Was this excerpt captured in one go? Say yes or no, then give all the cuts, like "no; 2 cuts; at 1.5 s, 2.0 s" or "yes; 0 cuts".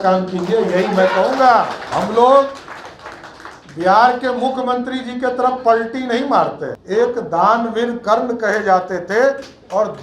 no; 2 cuts; at 1.8 s, 6.7 s